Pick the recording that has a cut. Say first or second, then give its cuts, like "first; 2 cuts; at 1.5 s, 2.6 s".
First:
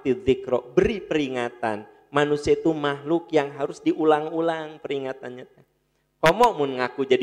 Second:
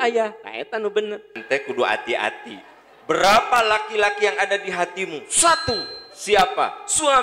second; 1 cut; at 1.3 s